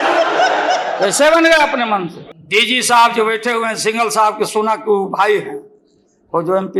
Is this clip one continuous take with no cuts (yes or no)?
yes